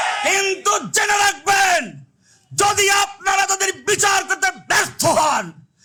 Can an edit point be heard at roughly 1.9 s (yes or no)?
no